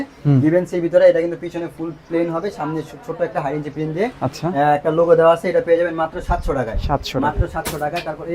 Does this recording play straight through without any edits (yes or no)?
yes